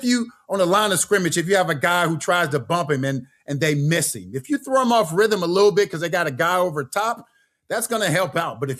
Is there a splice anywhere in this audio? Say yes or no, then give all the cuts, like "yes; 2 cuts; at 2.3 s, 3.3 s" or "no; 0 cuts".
no; 0 cuts